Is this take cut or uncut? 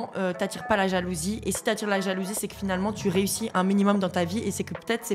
uncut